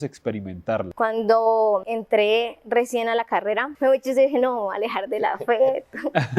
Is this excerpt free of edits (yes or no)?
no